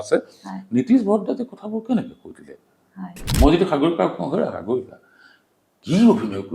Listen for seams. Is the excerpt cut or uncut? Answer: cut